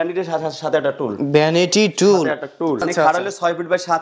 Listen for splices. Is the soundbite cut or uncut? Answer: cut